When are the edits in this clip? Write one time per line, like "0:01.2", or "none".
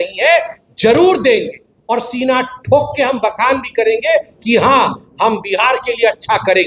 none